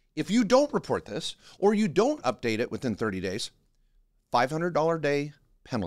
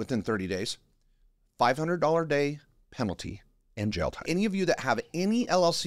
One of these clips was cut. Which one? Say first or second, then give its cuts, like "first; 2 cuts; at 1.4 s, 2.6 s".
second; 1 cut; at 4.2 s